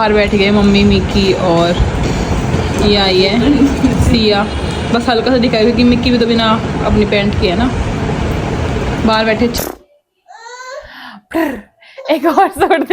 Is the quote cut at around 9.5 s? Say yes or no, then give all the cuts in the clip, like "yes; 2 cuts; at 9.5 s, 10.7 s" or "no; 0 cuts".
yes; 1 cut; at 9.5 s